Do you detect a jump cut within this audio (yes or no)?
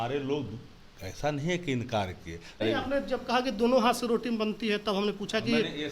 yes